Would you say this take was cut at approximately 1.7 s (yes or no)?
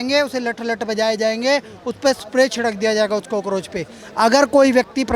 no